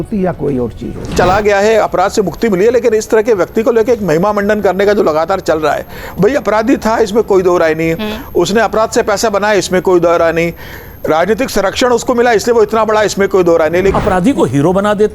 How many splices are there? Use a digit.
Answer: 2